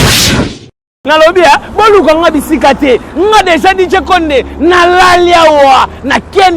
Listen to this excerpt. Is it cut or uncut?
cut